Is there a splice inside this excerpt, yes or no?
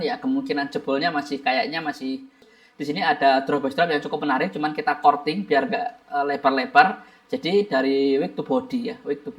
yes